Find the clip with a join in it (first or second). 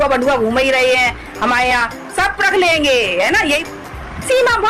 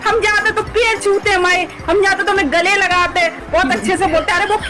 first